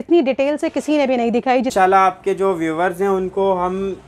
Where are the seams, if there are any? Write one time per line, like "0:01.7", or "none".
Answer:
0:01.7